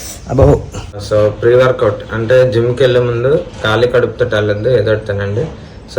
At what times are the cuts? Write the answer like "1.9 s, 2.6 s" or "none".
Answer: 1.0 s